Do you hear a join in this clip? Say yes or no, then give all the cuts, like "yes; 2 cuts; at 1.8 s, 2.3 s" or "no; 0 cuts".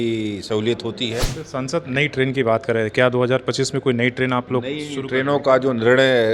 yes; 1 cut; at 1.4 s